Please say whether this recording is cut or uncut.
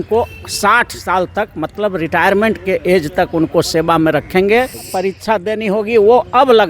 cut